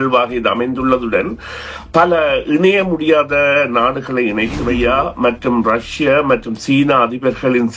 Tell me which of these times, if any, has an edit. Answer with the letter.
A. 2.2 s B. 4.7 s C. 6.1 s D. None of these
B